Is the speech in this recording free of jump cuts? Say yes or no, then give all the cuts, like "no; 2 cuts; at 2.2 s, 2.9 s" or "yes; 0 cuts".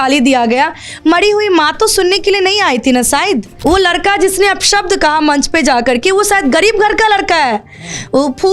no; 1 cut; at 3.5 s